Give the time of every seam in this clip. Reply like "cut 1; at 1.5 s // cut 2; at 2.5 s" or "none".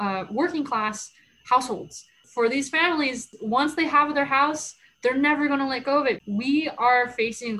cut 1; at 2.2 s // cut 2; at 3.3 s // cut 3; at 6.2 s